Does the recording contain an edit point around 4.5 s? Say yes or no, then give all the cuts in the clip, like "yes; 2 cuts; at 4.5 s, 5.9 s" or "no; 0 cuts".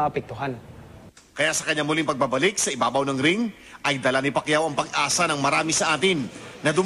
no; 0 cuts